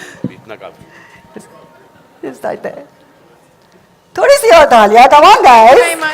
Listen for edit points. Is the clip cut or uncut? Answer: uncut